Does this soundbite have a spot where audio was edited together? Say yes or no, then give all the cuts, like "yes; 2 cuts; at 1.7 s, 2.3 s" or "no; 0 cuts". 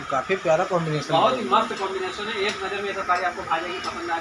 no; 0 cuts